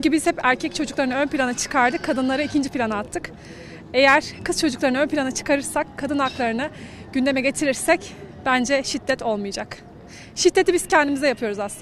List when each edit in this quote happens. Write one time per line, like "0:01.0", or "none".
none